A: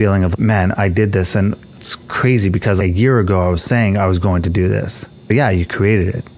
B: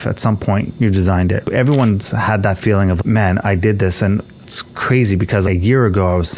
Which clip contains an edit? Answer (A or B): B